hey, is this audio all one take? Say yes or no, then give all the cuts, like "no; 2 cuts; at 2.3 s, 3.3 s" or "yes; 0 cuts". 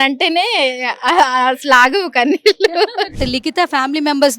no; 1 cut; at 3.2 s